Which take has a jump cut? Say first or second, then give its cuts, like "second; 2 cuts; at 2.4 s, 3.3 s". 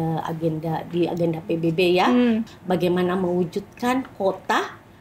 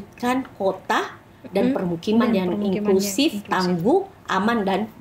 first; 1 cut; at 2.4 s